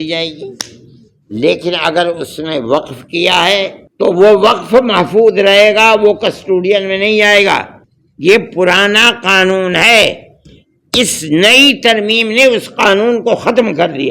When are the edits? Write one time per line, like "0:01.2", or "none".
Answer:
0:03.8